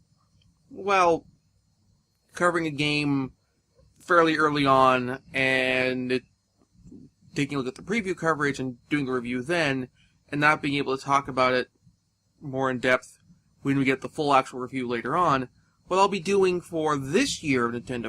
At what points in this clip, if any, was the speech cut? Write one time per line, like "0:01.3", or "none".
0:14.8